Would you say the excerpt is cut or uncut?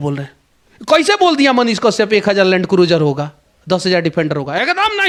uncut